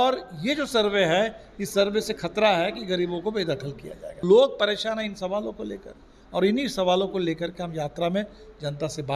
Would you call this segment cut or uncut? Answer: cut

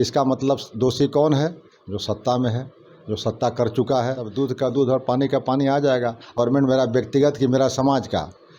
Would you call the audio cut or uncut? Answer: cut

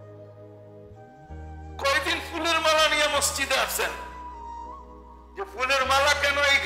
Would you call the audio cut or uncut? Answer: cut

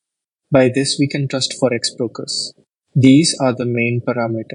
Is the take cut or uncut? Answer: uncut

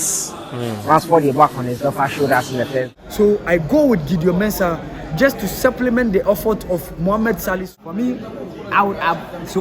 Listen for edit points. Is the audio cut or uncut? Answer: cut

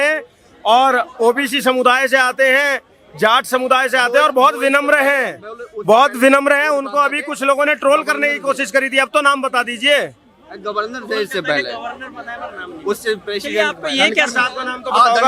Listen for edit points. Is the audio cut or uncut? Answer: uncut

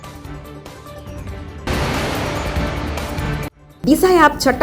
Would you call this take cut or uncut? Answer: cut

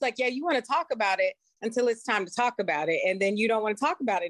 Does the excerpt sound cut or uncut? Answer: uncut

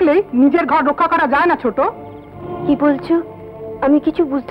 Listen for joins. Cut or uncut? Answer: uncut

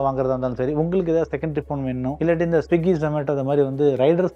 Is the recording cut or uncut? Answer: uncut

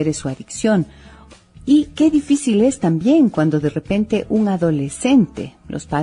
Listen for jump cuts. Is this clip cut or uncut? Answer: cut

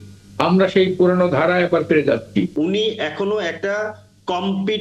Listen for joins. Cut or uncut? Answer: cut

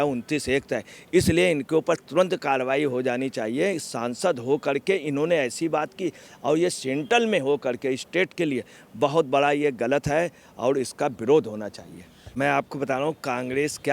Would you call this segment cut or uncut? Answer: cut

